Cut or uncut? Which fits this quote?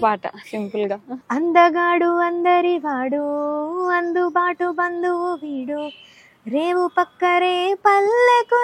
cut